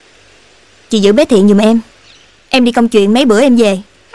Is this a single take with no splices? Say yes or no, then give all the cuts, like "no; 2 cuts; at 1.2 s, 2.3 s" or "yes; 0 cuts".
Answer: yes; 0 cuts